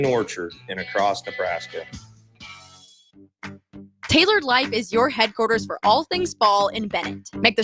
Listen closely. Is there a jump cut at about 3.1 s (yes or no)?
yes